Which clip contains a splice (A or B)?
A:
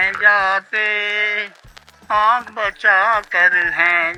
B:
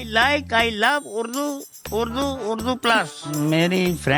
B